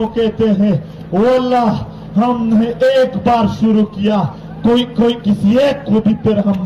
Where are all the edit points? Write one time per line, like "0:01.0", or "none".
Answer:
none